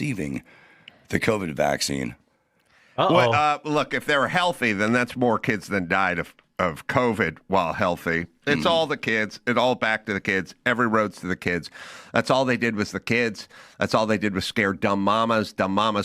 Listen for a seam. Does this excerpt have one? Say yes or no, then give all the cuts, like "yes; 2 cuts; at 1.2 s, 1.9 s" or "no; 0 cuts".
yes; 1 cut; at 11.4 s